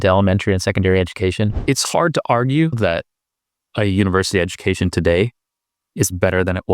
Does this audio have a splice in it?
yes; 2 cuts; at 1.6 s, 2.8 s

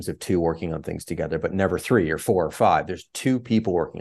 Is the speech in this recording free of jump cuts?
yes; 0 cuts

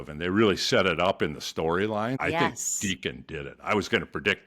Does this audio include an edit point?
yes; 1 cut; at 2.5 s

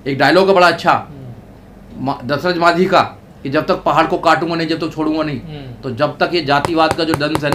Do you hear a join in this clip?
no; 0 cuts

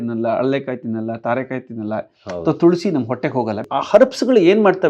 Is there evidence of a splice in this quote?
yes; 1 cut; at 3.6 s

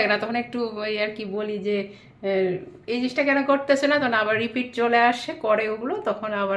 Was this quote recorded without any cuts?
yes; 0 cuts

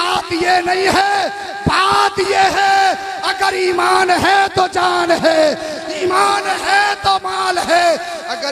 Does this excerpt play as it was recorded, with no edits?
yes; 0 cuts

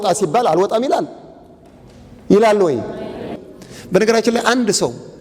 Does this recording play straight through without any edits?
no; 1 cut; at 3.4 s

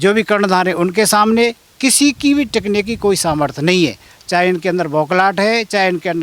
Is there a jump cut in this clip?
no; 0 cuts

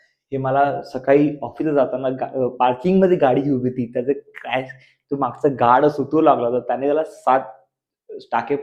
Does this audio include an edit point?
no; 0 cuts

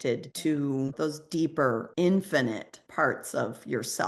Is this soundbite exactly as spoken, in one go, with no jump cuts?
yes; 0 cuts

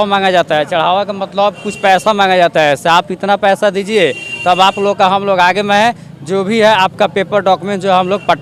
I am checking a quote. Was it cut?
no; 0 cuts

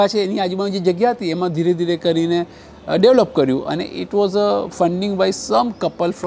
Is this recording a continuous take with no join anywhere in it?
yes; 0 cuts

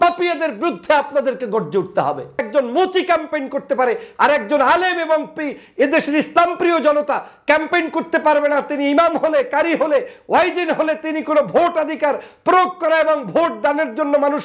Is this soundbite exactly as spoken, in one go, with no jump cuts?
no; 1 cut; at 2.5 s

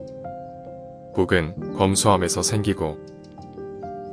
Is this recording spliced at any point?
yes; 1 cut; at 1.1 s

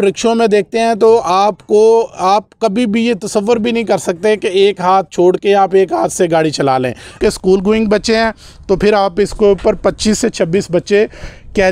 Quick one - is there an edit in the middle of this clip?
yes; 1 cut; at 7.1 s

